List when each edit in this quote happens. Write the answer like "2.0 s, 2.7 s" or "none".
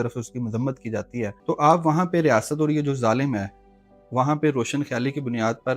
1.4 s